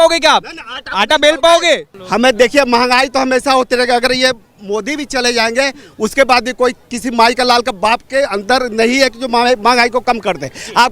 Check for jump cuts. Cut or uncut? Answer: cut